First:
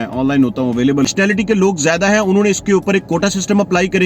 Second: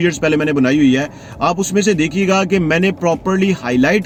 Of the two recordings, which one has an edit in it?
first; 1 cut; at 1.1 s

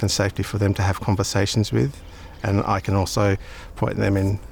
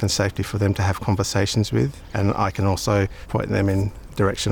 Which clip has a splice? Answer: second; 2 cuts; at 2.0 s, 3.2 s

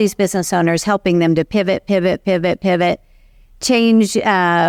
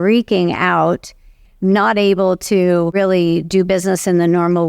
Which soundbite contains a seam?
second; 2 cuts; at 1.4 s, 2.9 s

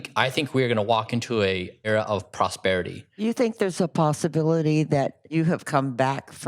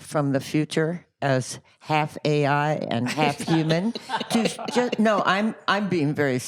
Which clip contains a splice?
first; 3 cuts; at 1.9 s, 3.0 s, 5.2 s

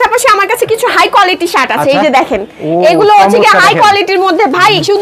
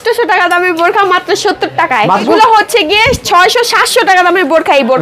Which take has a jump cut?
second; 1 cut; at 2.2 s

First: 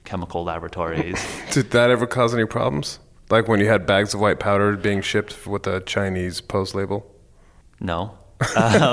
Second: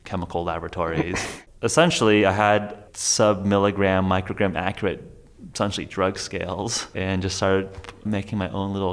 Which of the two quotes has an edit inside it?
second; 2 cuts; at 1.4 s, 6.9 s

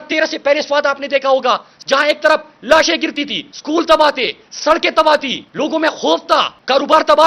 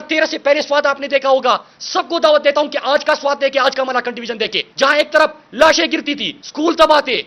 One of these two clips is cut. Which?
first; 1 cut; at 1.7 s

